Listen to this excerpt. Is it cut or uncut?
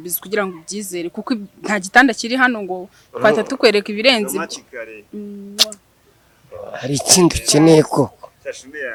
uncut